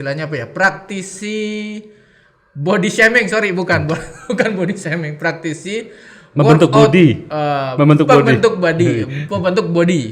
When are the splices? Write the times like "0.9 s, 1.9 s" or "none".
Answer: none